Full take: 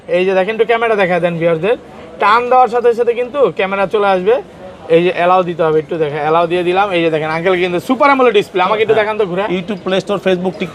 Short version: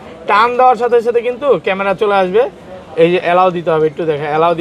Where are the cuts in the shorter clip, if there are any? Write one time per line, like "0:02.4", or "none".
none